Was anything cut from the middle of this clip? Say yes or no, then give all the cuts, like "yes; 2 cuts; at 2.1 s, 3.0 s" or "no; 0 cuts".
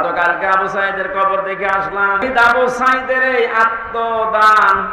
yes; 1 cut; at 2.2 s